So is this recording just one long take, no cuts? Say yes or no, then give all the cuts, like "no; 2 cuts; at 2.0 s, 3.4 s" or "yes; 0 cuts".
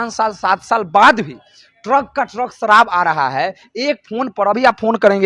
yes; 0 cuts